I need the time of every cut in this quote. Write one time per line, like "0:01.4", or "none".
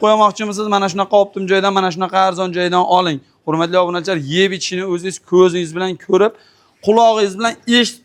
none